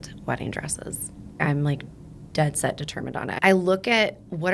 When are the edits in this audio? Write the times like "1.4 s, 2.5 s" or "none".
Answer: 1.4 s, 3.3 s